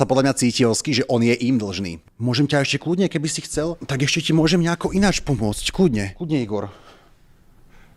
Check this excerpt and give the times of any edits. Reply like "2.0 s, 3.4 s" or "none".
2.0 s